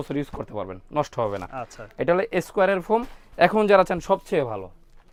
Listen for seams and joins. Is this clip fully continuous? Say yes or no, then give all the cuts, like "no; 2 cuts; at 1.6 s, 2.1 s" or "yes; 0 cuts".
yes; 0 cuts